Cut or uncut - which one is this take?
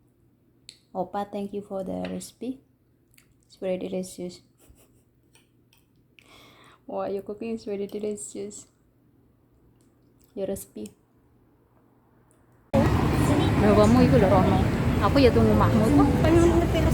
cut